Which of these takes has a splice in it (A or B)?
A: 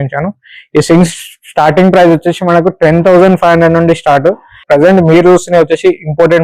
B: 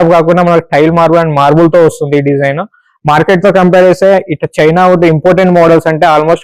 A